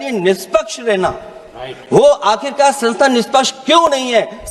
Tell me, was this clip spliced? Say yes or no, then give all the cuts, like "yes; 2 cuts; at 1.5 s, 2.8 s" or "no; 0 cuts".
no; 0 cuts